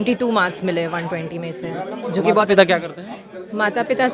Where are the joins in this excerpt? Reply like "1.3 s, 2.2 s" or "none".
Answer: none